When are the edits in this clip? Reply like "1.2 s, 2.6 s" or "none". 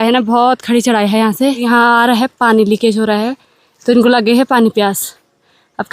none